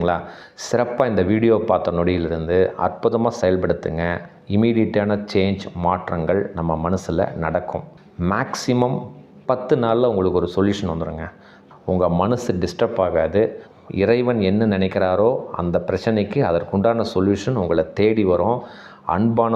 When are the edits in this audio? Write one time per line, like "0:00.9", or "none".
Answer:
0:11.5